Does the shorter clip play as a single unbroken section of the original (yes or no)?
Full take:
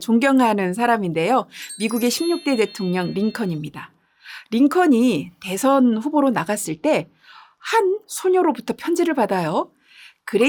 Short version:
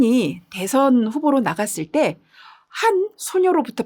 yes